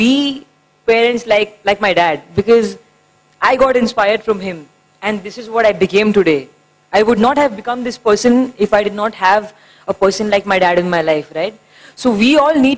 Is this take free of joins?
yes; 0 cuts

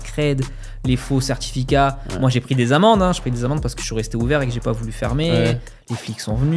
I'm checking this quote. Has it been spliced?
no; 0 cuts

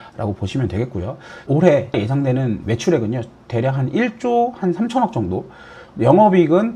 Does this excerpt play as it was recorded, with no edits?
no; 2 cuts; at 1.3 s, 2.1 s

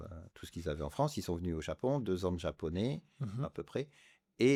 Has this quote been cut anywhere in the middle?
no; 0 cuts

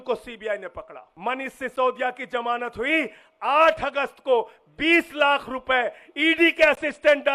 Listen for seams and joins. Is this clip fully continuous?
no; 1 cut; at 1.1 s

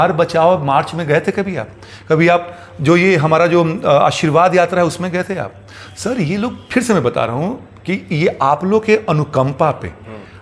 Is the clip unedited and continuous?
yes; 0 cuts

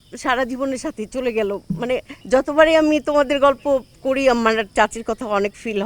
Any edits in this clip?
yes; 1 cut; at 2.1 s

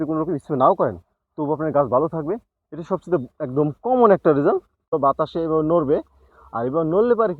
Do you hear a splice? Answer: yes; 1 cut; at 4.9 s

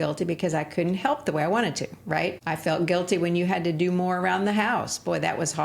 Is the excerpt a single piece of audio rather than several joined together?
no; 1 cut; at 2.4 s

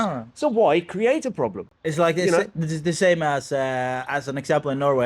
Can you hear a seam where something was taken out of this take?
no; 0 cuts

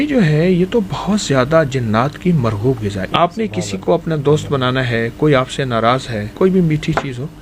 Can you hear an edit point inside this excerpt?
yes; 2 cuts; at 3.1 s, 6.4 s

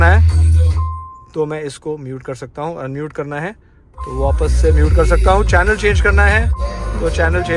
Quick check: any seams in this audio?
no; 0 cuts

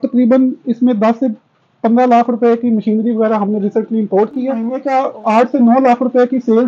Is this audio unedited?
no; 1 cut; at 4.8 s

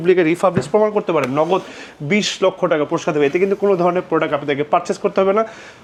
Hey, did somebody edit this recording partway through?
no; 0 cuts

